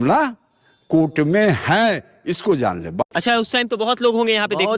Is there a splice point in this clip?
yes; 1 cut; at 3.0 s

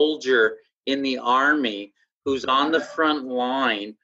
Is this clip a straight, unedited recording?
yes; 0 cuts

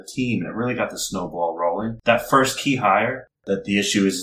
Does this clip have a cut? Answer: yes; 2 cuts; at 2.0 s, 3.3 s

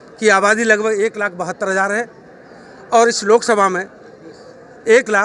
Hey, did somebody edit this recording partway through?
no; 0 cuts

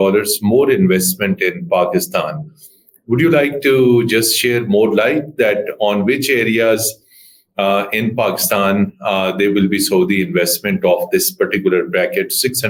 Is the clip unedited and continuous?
yes; 0 cuts

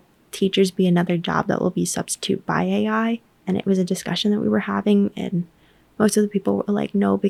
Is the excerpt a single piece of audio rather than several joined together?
yes; 0 cuts

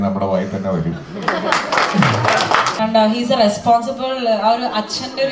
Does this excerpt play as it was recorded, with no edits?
no; 1 cut; at 2.7 s

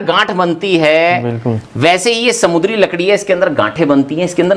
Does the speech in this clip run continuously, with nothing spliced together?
yes; 0 cuts

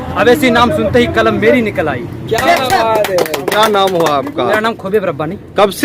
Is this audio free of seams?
yes; 0 cuts

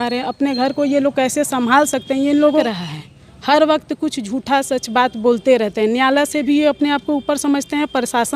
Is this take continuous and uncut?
no; 1 cut; at 2.6 s

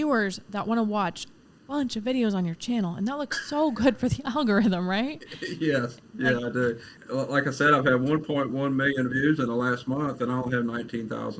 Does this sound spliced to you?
yes; 1 cut; at 6.9 s

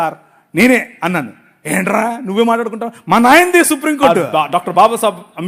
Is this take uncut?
no; 1 cut; at 4.2 s

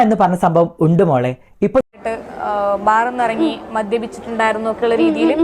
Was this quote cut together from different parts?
yes; 1 cut; at 1.8 s

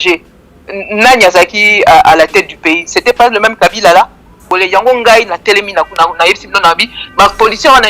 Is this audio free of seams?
no; 1 cut; at 4.4 s

